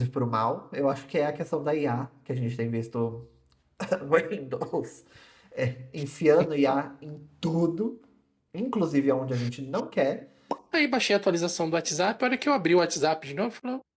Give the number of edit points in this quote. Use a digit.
1